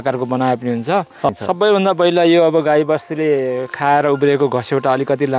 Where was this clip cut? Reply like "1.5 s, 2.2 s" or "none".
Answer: 1.3 s